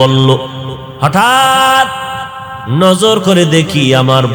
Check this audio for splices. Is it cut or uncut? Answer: uncut